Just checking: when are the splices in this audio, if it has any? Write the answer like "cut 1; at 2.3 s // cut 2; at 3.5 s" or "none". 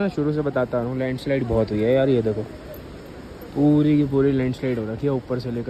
none